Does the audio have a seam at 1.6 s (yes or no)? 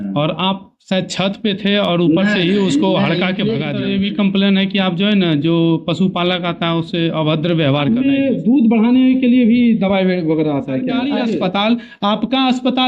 no